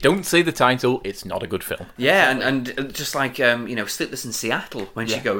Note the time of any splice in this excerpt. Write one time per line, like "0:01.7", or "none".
0:01.8